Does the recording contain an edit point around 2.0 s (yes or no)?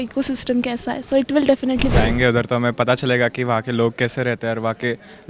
yes